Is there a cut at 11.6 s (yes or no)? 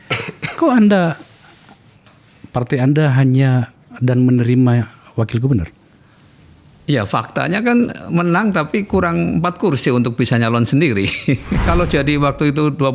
yes